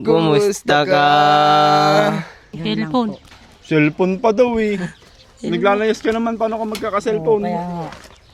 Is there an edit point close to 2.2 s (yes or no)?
yes